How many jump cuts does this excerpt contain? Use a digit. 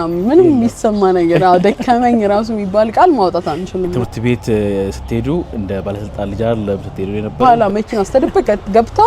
2